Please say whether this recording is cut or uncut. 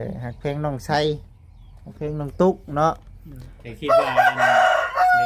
uncut